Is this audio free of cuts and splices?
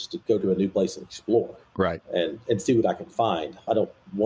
yes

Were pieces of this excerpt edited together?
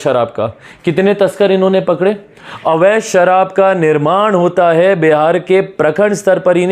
no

